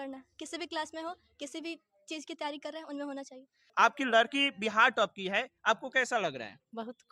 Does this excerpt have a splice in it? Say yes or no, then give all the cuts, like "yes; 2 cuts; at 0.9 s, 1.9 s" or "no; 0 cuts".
yes; 1 cut; at 3.6 s